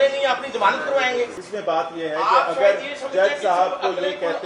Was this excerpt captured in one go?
no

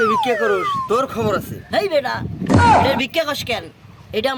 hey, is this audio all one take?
yes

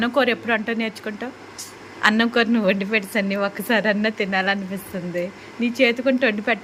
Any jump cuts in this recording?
no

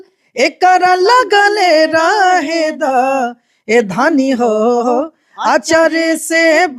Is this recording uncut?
yes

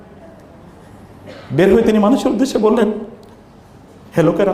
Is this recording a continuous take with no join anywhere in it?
yes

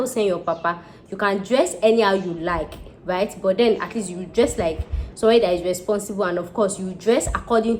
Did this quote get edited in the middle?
no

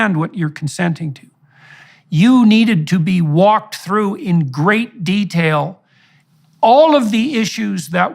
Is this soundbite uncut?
no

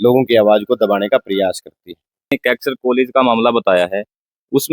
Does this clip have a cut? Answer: yes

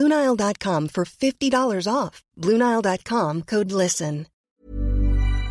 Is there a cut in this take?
yes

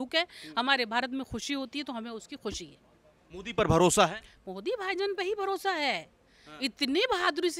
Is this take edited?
no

